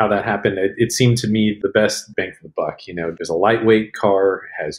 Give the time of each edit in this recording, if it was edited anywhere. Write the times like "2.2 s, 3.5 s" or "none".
3.1 s